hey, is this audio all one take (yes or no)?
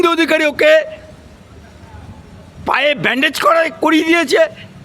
yes